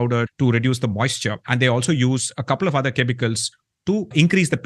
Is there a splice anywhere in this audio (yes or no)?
no